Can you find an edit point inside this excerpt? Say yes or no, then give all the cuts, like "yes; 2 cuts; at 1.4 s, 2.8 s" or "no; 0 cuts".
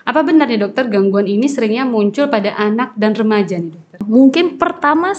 yes; 1 cut; at 4.0 s